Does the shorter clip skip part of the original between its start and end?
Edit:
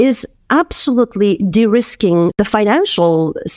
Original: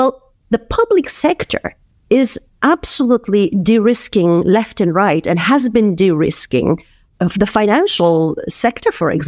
yes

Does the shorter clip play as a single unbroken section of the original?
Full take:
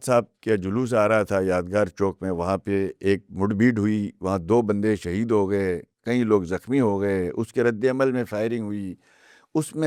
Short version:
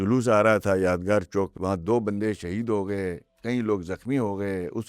no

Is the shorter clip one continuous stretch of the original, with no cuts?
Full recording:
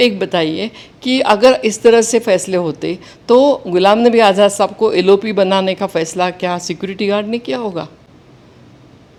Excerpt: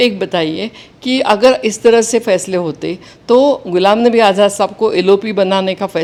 yes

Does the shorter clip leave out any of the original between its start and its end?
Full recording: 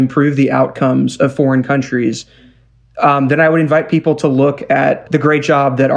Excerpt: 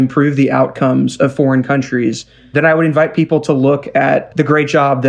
yes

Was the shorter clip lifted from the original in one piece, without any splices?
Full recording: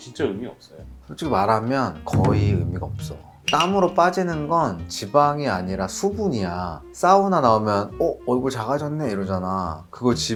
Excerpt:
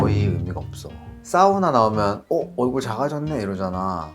no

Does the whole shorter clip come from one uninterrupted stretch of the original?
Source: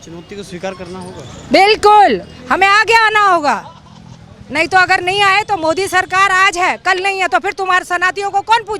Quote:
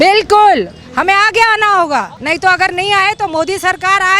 no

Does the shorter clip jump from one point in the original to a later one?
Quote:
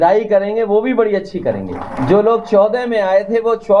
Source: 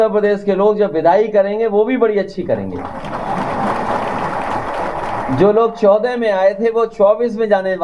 yes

